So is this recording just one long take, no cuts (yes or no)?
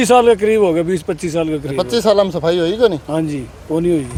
yes